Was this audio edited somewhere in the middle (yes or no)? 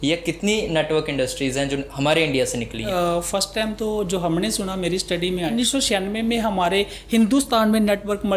yes